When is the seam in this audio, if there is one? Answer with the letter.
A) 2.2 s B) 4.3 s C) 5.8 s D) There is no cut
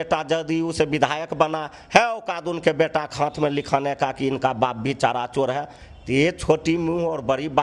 C